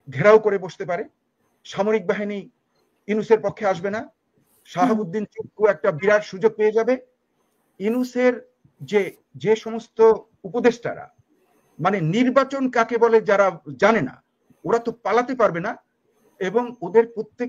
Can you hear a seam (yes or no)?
no